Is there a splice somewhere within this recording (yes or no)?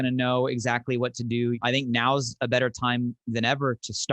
yes